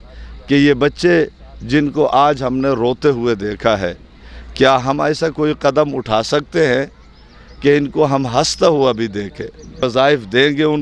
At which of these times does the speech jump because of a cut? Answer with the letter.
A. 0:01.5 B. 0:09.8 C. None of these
B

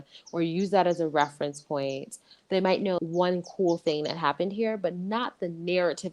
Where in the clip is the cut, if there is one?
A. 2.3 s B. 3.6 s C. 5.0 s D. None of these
A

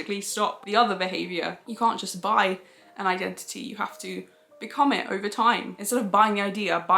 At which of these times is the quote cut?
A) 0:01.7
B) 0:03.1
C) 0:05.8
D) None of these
C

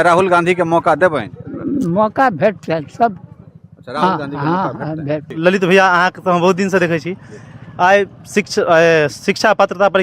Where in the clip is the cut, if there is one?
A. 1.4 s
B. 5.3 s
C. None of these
B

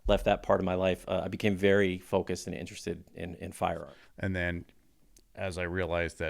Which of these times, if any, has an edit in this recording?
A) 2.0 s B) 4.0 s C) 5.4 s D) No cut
B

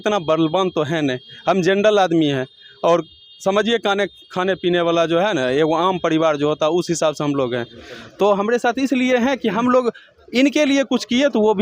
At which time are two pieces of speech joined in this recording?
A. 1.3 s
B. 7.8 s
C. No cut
B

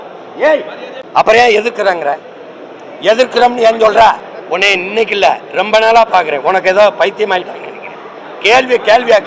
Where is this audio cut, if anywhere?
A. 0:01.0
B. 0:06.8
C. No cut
A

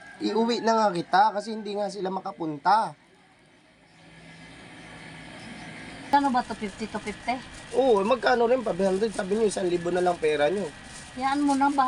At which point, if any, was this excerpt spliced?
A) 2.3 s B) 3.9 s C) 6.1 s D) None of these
C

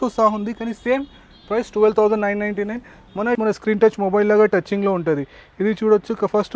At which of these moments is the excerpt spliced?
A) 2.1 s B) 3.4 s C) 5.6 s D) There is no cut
B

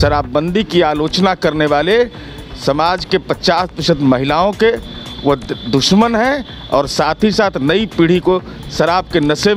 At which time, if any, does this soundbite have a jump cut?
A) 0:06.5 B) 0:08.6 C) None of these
C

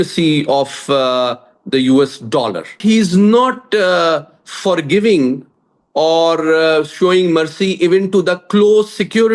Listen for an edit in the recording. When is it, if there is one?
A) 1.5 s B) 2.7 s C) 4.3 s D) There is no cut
B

